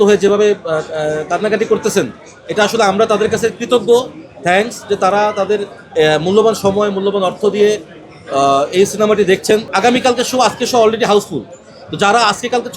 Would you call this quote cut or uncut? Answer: cut